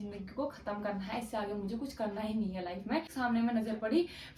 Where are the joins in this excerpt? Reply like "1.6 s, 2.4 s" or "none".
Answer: 3.1 s